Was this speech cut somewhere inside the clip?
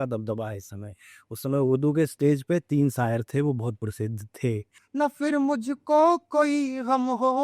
yes; 1 cut; at 4.8 s

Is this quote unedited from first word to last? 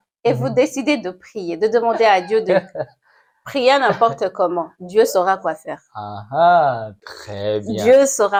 yes; 0 cuts

